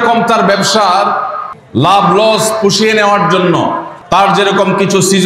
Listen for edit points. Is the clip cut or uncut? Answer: cut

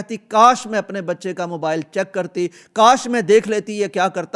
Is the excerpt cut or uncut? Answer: uncut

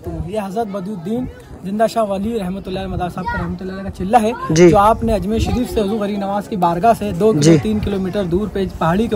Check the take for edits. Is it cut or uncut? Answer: uncut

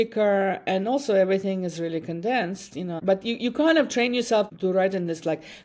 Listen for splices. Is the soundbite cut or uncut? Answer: cut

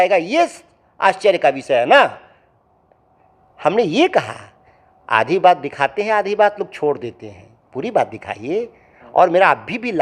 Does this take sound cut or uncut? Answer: uncut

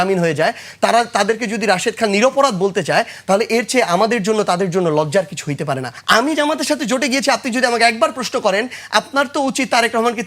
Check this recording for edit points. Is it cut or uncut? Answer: cut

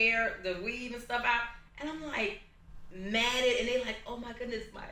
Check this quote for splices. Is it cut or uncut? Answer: uncut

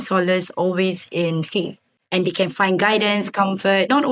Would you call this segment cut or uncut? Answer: uncut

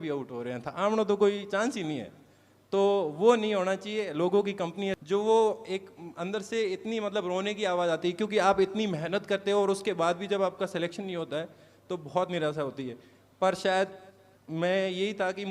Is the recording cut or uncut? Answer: cut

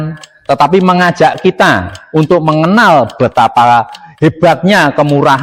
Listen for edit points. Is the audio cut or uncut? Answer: uncut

